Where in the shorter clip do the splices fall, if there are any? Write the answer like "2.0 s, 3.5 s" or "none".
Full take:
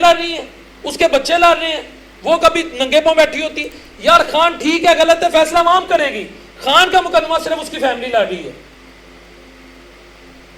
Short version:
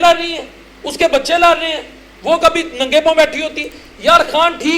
none